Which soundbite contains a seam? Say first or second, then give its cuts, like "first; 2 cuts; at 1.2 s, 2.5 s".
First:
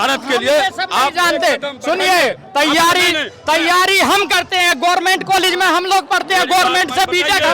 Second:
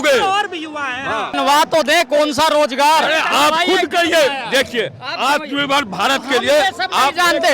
second; 1 cut; at 1.3 s